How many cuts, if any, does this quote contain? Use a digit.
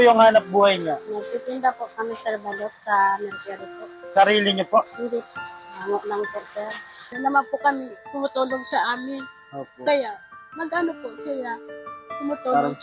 1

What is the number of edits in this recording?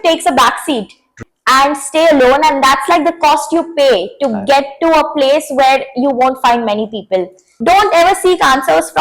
2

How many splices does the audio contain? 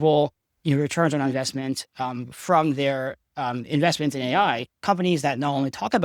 1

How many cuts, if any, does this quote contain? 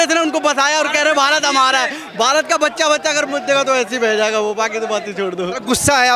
0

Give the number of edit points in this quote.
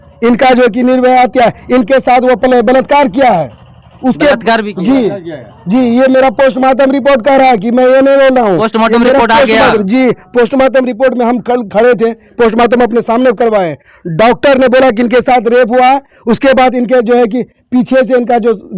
0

